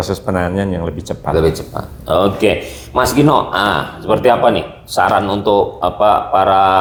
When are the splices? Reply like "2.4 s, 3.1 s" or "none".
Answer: none